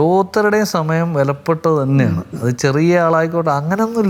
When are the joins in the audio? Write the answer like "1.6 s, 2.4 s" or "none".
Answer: none